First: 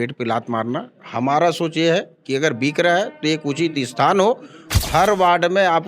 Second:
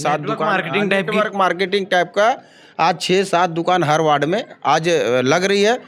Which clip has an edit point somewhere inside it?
first; 1 cut; at 4.7 s

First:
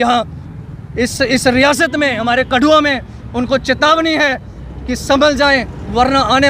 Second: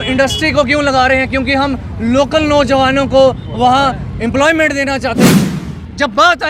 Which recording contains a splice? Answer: second; 1 cut; at 5.3 s

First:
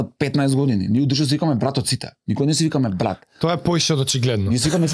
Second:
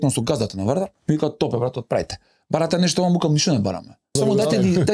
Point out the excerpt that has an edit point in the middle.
second; 2 cuts; at 1.0 s, 4.1 s

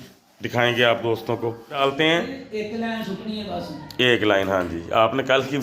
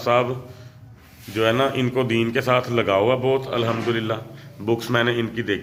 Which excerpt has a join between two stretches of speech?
first; 1 cut; at 1.8 s

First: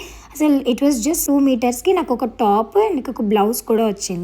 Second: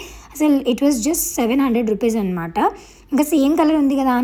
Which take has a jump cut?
first; 1 cut; at 1.2 s

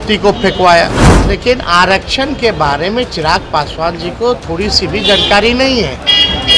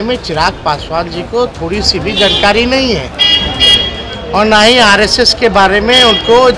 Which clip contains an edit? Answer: first; 1 cut; at 1.1 s

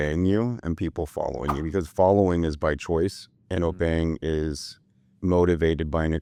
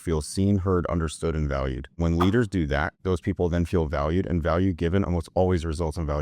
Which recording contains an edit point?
second; 2 cuts; at 2.0 s, 2.9 s

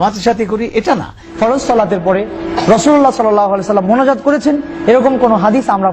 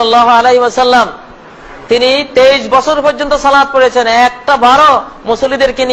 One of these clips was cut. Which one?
first; 1 cut; at 1.2 s

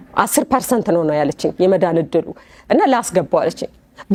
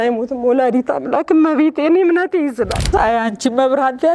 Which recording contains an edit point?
second; 1 cut; at 2.9 s

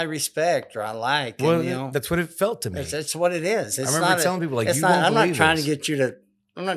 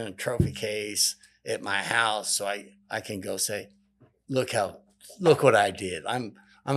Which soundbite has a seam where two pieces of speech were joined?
second; 1 cut; at 2.7 s

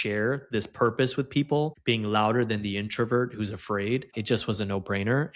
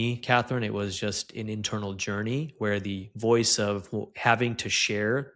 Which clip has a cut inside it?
first; 2 cuts; at 1.8 s, 4.2 s

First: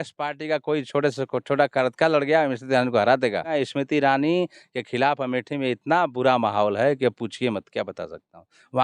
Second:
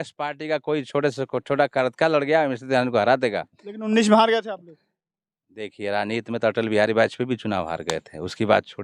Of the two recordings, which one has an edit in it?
first; 1 cut; at 3.5 s

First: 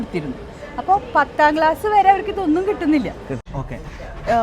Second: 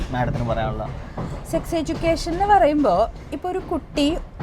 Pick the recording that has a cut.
first; 1 cut; at 3.3 s

